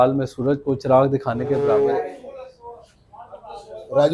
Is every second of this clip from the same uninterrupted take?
no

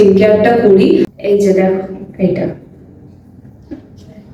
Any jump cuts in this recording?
yes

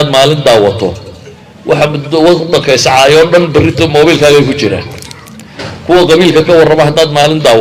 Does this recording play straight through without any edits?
yes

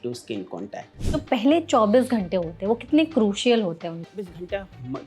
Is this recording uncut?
no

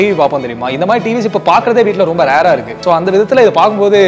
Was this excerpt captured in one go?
no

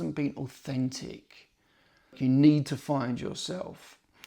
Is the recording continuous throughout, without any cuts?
no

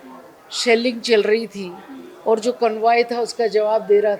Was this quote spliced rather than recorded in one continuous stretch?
no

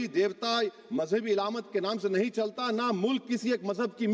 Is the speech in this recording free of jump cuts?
yes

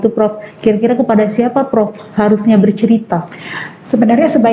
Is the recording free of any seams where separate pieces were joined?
yes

